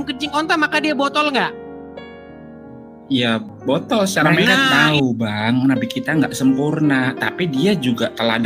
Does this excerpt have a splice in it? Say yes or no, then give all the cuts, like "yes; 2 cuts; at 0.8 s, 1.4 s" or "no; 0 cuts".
yes; 1 cut; at 4.7 s